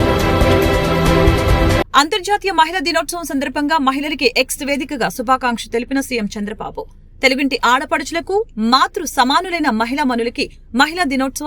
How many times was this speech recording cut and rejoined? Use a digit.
1